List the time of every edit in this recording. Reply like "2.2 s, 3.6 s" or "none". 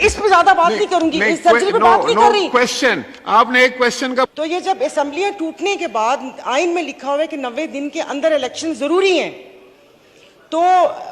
4.3 s